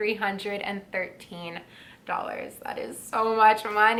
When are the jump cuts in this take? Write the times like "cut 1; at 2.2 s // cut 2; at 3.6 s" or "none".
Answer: none